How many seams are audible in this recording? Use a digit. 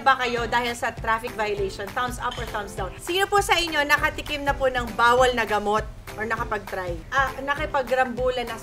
2